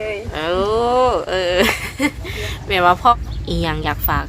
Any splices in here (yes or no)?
yes